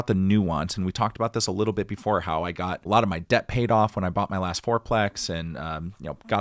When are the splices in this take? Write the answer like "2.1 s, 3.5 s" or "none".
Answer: 2.8 s